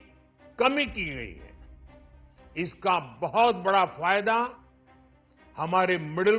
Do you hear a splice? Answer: no; 0 cuts

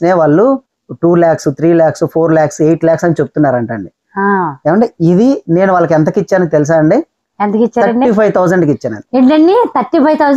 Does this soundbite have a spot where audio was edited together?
no; 0 cuts

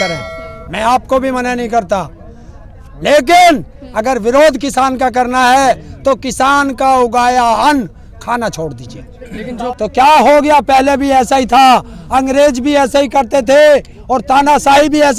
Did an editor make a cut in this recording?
yes; 1 cut; at 9.6 s

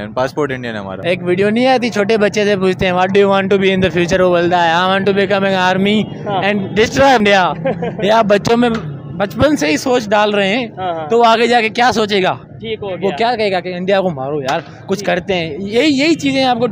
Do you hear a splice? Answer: yes; 2 cuts; at 0.9 s, 7.2 s

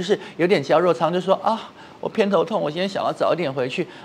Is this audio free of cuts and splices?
yes; 0 cuts

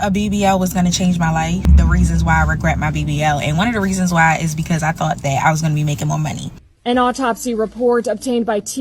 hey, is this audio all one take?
no; 2 cuts; at 1.7 s, 6.6 s

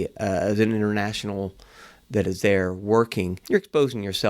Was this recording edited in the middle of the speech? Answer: yes; 1 cut; at 3.4 s

